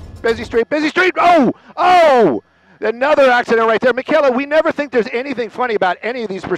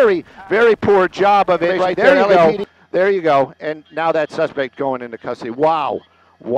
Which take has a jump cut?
second; 1 cut; at 2.3 s

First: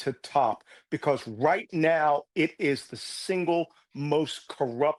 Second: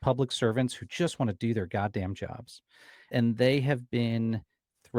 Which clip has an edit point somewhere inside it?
second; 1 cut; at 3.1 s

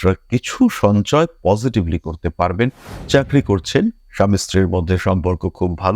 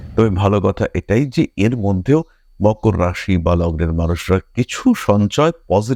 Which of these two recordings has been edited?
first; 1 cut; at 2.9 s

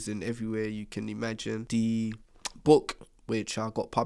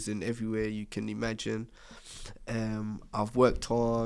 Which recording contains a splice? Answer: first; 1 cut; at 1.6 s

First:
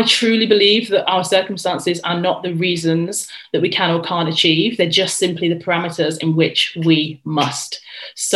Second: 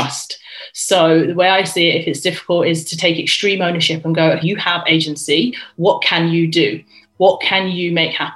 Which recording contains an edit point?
second; 1 cut; at 4.4 s

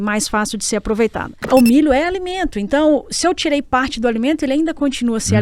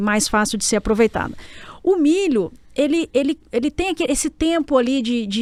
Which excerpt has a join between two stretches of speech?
first; 1 cut; at 1.3 s

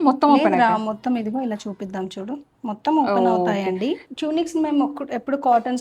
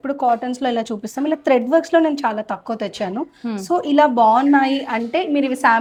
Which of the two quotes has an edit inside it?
first; 1 cut; at 4.0 s

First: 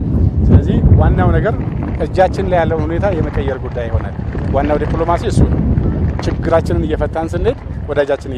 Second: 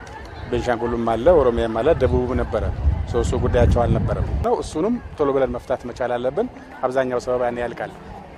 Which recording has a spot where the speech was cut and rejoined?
second; 1 cut; at 4.3 s

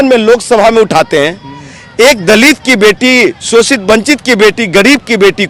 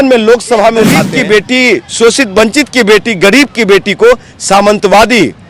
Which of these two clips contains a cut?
second; 1 cut; at 1.0 s

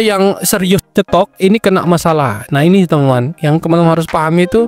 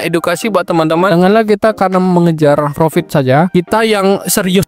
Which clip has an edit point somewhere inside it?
second; 1 cut; at 1.1 s

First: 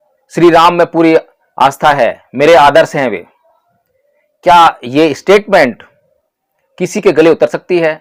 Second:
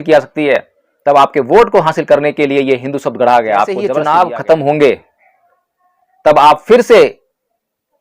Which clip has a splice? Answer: second; 1 cut; at 3.9 s

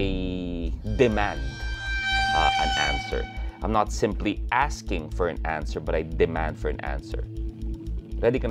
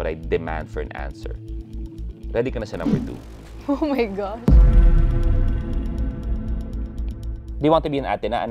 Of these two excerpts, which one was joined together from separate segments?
second; 1 cut; at 7.4 s

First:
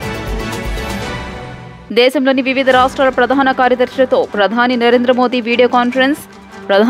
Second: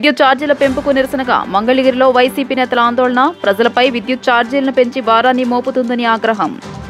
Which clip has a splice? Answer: first; 1 cut; at 1.3 s

